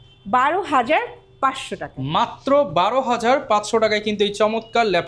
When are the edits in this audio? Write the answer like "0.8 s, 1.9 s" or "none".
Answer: none